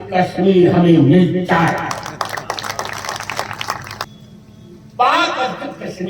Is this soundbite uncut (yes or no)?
no